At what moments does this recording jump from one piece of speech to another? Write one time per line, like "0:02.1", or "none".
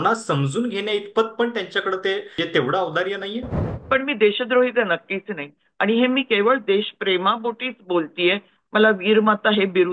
0:02.3
0:03.7